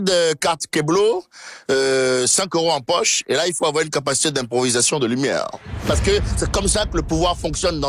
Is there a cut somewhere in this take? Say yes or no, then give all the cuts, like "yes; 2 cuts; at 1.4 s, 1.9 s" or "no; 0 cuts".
yes; 1 cut; at 5.8 s